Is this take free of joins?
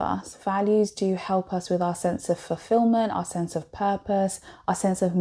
yes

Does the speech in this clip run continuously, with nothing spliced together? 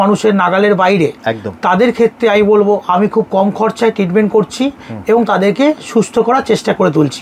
yes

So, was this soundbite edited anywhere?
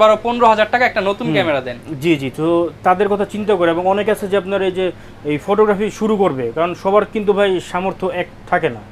no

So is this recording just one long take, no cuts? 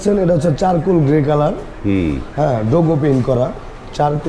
yes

